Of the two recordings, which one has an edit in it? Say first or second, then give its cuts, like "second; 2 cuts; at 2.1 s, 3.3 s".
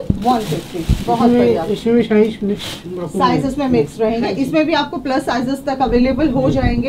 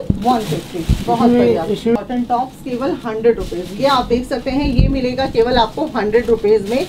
second; 1 cut; at 2.0 s